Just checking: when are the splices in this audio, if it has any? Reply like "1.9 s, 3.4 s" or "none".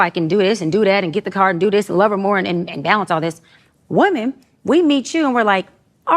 4.5 s